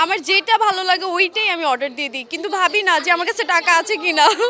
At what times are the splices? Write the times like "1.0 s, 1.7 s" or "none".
none